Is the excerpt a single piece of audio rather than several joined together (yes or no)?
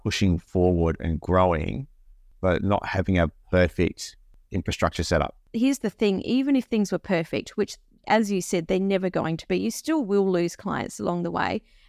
no